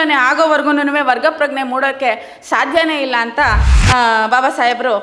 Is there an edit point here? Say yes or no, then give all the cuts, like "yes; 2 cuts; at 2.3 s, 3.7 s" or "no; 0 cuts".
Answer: no; 0 cuts